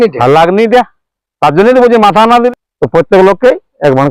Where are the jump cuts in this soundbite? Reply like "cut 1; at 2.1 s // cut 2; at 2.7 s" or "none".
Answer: cut 1; at 2.5 s